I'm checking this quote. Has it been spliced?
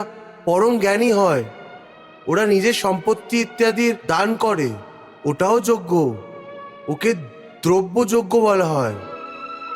no; 0 cuts

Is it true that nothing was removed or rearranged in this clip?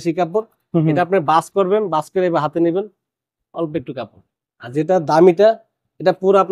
yes; 0 cuts

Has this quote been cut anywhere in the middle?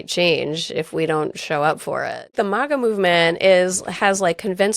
yes; 1 cut; at 2.3 s

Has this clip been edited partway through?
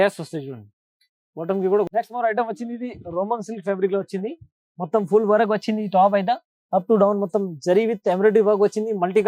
yes; 1 cut; at 1.9 s

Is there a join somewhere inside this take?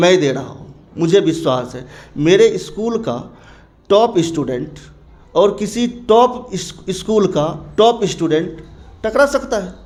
no; 0 cuts

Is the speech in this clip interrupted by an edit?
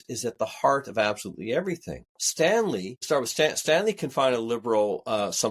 yes; 2 cuts; at 2.2 s, 2.9 s

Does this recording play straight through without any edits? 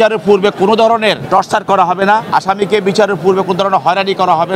no; 2 cuts; at 1.2 s, 2.2 s

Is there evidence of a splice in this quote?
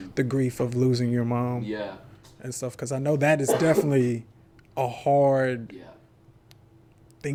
no; 0 cuts

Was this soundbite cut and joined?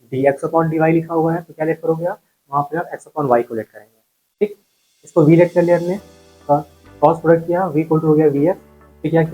no; 0 cuts

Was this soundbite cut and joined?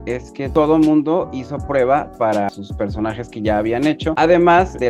no; 0 cuts

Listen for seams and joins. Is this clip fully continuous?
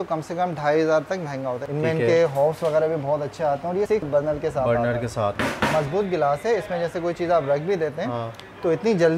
no; 3 cuts; at 1.6 s, 4.0 s, 5.4 s

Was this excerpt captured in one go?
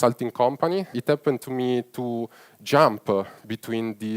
no; 1 cut; at 1.0 s

